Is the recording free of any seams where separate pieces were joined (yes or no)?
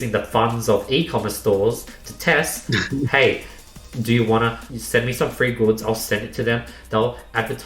no